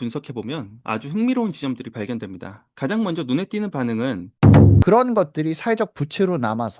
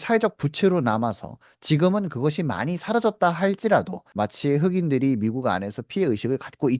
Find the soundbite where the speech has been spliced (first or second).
first